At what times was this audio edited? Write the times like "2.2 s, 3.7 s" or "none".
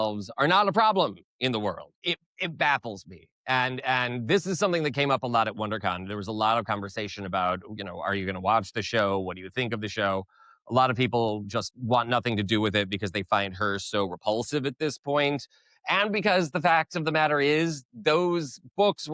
none